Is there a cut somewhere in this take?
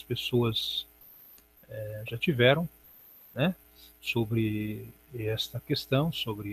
yes; 1 cut; at 2.4 s

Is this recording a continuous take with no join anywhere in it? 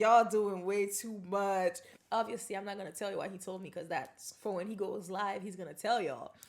no; 1 cut; at 1.9 s

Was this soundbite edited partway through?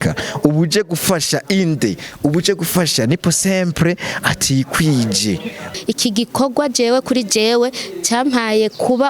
yes; 1 cut; at 5.7 s

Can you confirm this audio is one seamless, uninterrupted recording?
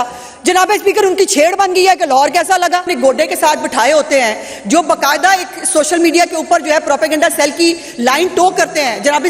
no; 1 cut; at 2.9 s

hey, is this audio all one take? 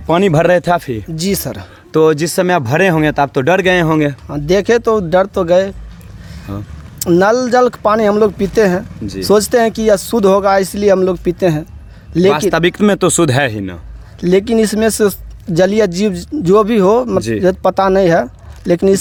yes; 0 cuts

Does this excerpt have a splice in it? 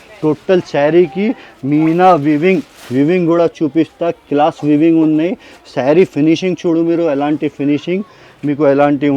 no; 0 cuts

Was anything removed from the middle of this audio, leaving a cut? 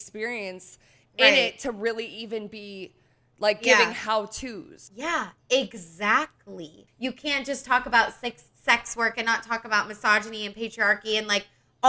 yes; 2 cuts; at 4.8 s, 6.8 s

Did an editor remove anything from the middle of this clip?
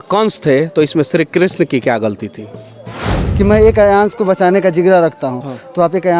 yes; 1 cut; at 3.2 s

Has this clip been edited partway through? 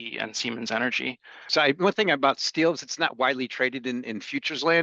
yes; 1 cut; at 1.5 s

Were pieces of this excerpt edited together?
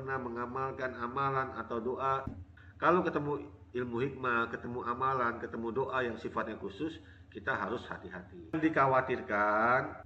yes; 2 cuts; at 2.2 s, 8.5 s

